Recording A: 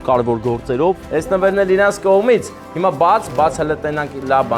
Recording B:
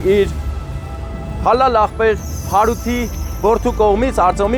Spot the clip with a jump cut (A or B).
A